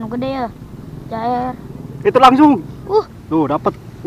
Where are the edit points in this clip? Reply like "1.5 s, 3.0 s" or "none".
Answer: 3.1 s